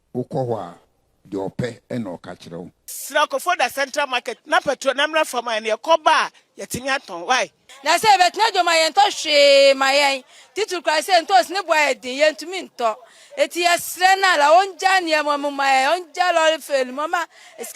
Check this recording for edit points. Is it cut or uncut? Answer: cut